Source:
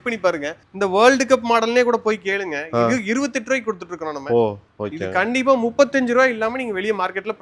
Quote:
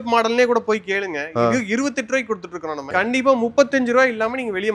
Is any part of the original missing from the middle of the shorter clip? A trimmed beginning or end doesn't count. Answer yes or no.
yes